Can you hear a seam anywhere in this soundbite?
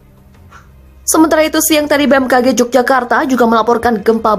no; 0 cuts

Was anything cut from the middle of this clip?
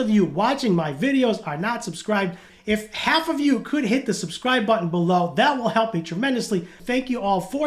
yes; 2 cuts; at 2.5 s, 6.8 s

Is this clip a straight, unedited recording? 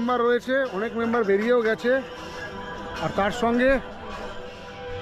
yes; 0 cuts

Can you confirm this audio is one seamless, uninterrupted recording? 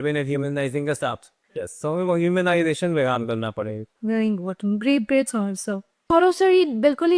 yes; 0 cuts

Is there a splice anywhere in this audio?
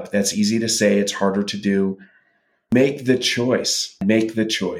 yes; 2 cuts; at 2.7 s, 4.0 s

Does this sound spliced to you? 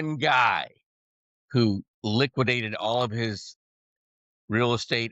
no; 0 cuts

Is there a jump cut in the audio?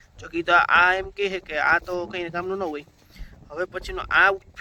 no; 0 cuts

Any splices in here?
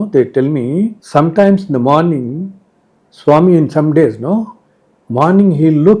yes; 1 cut; at 1.0 s

